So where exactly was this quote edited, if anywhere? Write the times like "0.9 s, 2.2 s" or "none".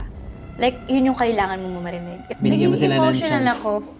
2.3 s